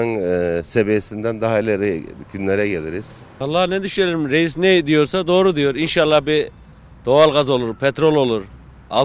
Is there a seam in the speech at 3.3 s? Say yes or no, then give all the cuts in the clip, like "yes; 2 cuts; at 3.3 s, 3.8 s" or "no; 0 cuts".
yes; 1 cut; at 3.3 s